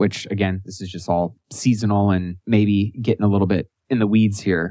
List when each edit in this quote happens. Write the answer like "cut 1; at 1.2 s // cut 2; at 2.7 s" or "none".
cut 1; at 2.3 s // cut 2; at 3.7 s